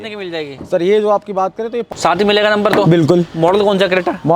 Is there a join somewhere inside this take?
yes; 1 cut; at 1.9 s

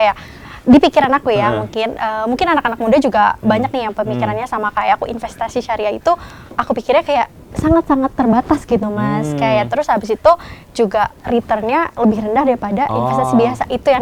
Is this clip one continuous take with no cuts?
yes; 0 cuts

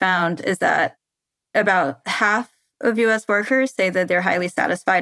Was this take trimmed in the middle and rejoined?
no; 0 cuts

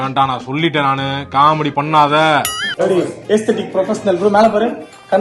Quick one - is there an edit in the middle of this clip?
yes; 1 cut; at 2.6 s

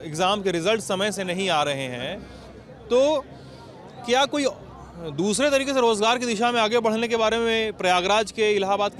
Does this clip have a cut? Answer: no; 0 cuts

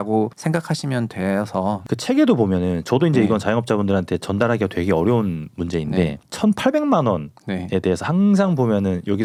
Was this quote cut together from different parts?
no; 0 cuts

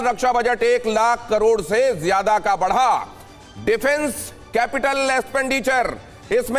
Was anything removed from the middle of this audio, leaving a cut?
no; 0 cuts

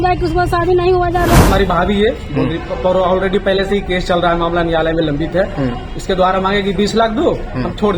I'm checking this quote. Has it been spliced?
yes; 1 cut; at 1.5 s

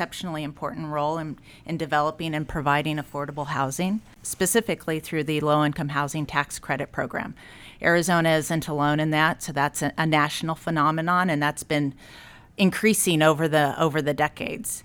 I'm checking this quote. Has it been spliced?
no; 0 cuts

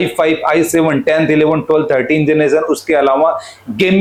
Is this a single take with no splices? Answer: yes; 0 cuts

